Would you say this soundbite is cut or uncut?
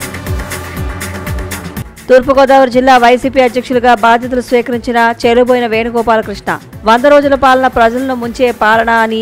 uncut